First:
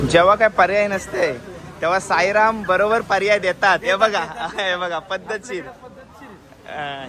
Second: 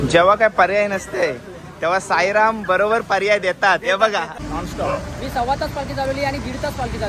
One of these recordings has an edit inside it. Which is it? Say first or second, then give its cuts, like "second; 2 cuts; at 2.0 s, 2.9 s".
second; 1 cut; at 4.3 s